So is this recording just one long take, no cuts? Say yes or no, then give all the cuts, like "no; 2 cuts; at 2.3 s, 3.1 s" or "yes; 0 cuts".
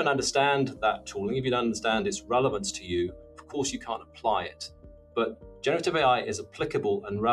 yes; 0 cuts